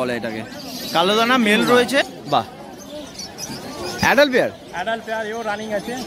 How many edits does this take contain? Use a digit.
1